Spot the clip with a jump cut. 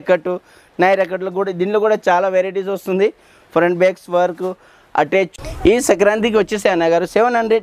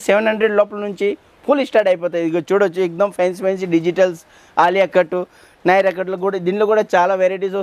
first; 1 cut; at 5.3 s

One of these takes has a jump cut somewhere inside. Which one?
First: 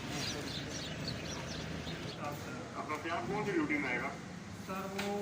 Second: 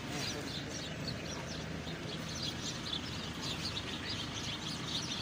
first; 1 cut; at 2.1 s

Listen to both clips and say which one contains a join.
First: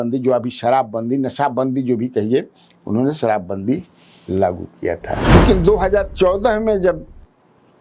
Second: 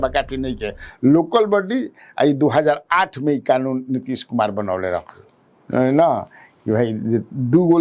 first; 1 cut; at 5.3 s

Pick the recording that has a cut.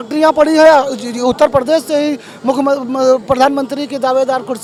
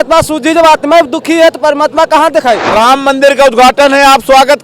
second; 1 cut; at 2.6 s

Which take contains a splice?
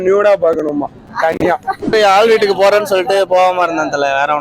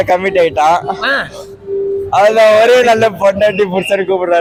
first; 1 cut; at 1.7 s

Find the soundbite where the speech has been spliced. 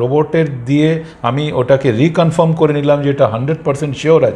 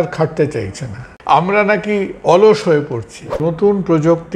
second; 2 cuts; at 1.1 s, 3.4 s

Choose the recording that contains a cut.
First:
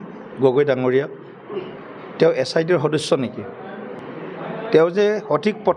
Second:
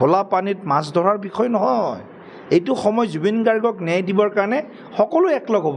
first; 1 cut; at 4.0 s

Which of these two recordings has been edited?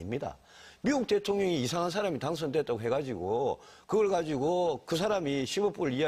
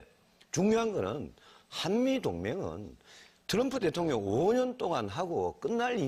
first; 1 cut; at 1.8 s

